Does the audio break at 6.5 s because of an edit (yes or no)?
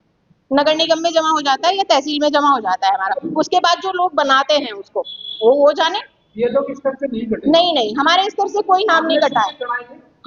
no